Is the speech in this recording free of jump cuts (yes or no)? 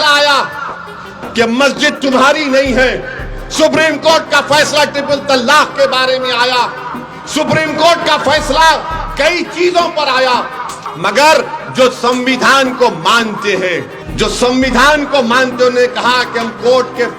no